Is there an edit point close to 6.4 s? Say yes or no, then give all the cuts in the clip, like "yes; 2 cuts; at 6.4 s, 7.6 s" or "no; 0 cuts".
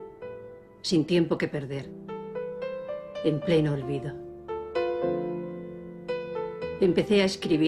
yes; 1 cut; at 6.4 s